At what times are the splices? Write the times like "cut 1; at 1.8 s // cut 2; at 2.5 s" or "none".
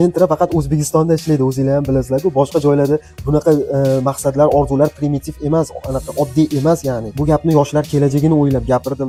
none